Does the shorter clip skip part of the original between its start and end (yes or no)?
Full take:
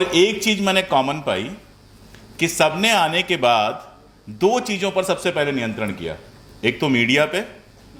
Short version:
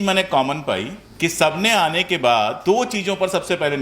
yes